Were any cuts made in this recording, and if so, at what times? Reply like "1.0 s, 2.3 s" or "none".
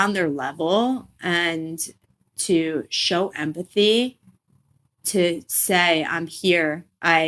4.9 s